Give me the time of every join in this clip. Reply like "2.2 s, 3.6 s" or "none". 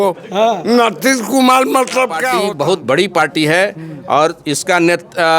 2.3 s